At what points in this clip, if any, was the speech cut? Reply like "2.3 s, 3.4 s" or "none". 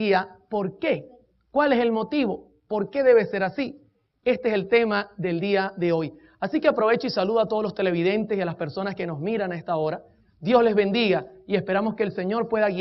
8.9 s